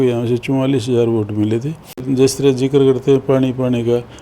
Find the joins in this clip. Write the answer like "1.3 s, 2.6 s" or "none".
2.0 s